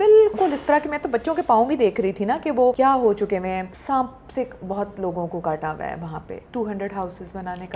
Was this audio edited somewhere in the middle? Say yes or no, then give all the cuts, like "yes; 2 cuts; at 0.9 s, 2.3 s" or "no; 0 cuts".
yes; 3 cuts; at 2.8 s, 3.7 s, 6.4 s